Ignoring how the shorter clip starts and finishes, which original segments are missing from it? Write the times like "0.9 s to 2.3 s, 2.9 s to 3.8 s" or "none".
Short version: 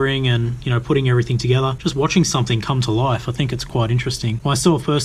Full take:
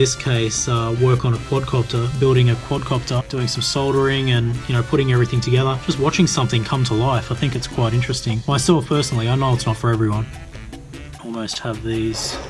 none